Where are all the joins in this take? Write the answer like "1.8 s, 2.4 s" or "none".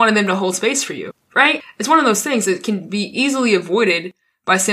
1.4 s